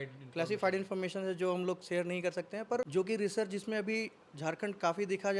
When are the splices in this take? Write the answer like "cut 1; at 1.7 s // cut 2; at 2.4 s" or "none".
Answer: cut 1; at 2.9 s